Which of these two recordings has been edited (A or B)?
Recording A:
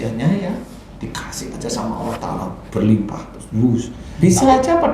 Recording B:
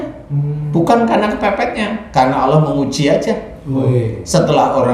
A